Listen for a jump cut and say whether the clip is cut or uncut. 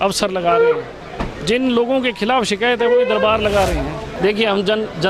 cut